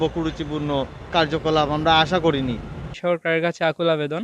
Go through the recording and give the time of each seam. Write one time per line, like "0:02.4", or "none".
0:01.0
0:03.0